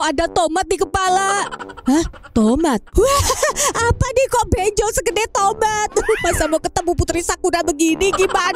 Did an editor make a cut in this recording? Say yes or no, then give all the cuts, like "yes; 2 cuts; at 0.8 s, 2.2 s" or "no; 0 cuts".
no; 0 cuts